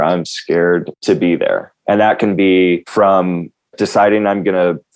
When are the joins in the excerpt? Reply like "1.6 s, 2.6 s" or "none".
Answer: 1.7 s, 2.9 s